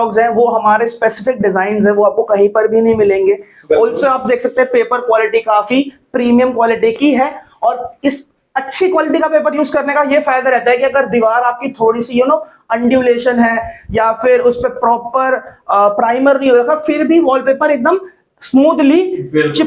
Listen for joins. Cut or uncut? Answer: uncut